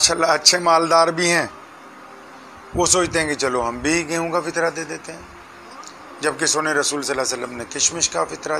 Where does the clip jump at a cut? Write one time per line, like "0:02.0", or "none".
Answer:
none